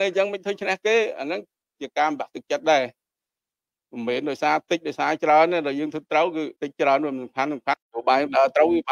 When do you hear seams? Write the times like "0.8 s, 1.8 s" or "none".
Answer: 6.6 s, 7.9 s